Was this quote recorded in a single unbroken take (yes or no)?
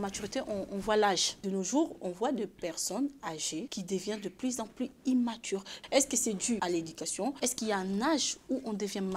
no